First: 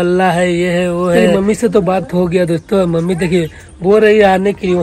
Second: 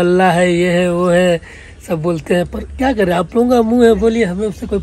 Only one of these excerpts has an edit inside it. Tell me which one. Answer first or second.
first